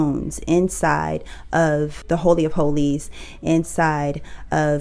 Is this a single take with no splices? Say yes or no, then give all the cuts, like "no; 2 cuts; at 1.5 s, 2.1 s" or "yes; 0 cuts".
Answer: yes; 0 cuts